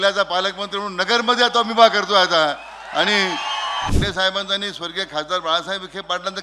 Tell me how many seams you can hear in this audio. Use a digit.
1